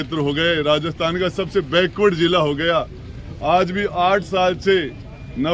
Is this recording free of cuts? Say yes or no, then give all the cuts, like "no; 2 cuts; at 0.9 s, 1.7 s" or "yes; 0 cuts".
yes; 0 cuts